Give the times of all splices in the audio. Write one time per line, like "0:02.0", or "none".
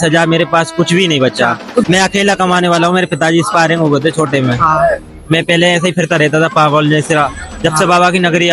0:01.9